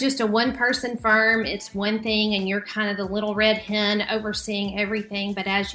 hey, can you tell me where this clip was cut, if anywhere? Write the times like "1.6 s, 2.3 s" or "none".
none